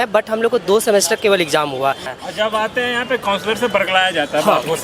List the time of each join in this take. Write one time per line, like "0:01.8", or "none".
0:02.1

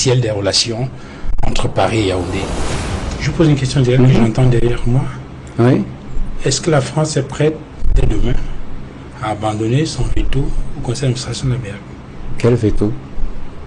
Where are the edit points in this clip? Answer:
0:02.5

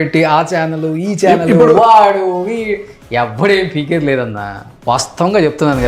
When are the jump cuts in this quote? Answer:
none

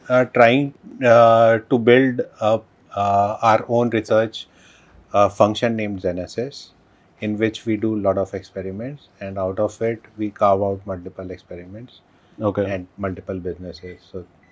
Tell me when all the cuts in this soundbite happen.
none

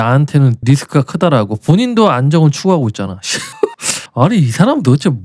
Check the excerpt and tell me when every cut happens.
none

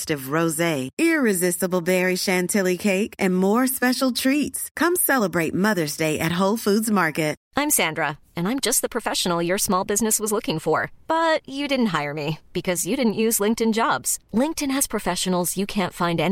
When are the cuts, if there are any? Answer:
0:07.4

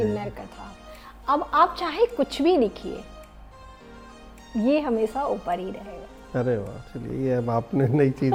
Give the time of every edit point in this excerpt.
none

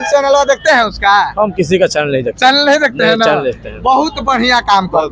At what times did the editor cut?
none

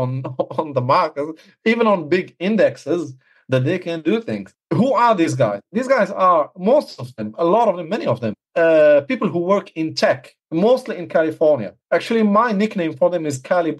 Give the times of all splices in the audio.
0:04.5
0:08.4
0:10.3
0:11.7

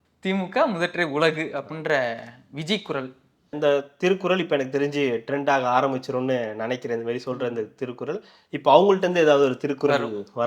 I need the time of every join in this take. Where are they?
0:03.5

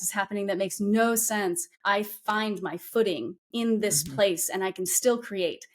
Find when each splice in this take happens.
0:01.7

